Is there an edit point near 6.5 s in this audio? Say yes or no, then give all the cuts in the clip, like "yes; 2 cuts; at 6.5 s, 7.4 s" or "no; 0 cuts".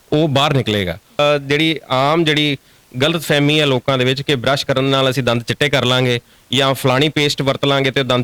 no; 1 cut; at 1.2 s